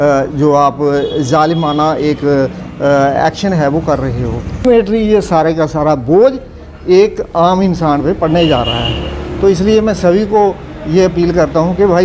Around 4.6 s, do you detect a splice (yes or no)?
yes